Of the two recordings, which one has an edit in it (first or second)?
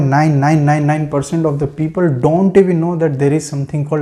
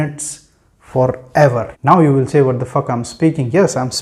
second